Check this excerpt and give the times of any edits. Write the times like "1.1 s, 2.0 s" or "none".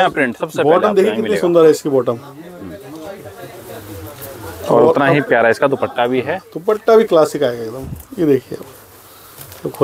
none